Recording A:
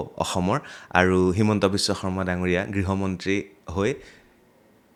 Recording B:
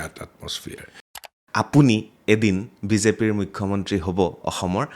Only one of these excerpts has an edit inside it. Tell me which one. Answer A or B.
B